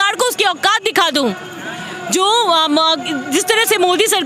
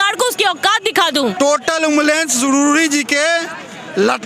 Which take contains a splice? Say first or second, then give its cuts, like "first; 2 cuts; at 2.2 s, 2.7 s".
second; 1 cut; at 1.3 s